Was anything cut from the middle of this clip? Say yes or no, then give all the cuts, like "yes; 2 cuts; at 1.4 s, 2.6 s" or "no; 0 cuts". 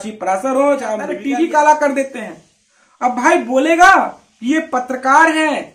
yes; 1 cut; at 1.2 s